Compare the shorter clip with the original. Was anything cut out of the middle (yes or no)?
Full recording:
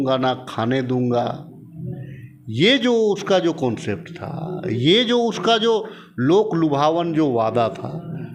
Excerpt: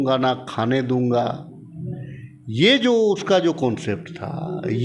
no